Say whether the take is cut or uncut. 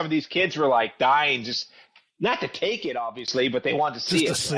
uncut